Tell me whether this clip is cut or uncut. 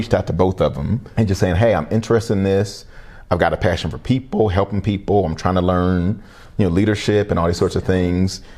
cut